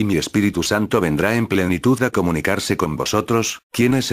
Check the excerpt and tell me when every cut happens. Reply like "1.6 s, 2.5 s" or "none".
2.0 s